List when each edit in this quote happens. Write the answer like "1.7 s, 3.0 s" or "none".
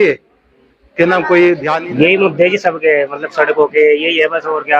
1.8 s